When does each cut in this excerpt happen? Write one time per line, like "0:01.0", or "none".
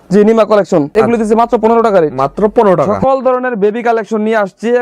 0:00.9
0:02.9